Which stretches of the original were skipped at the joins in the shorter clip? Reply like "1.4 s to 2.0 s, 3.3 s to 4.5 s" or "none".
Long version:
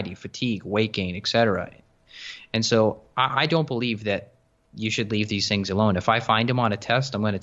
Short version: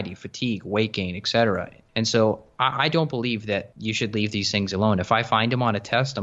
1.8 s to 2.3 s, 4.3 s to 4.7 s